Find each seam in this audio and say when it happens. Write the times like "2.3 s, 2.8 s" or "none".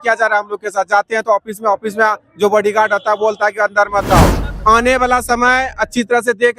4.4 s